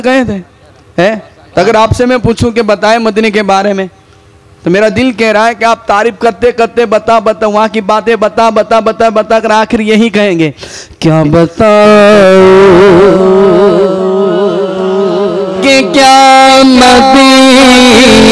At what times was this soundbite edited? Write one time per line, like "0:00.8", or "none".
none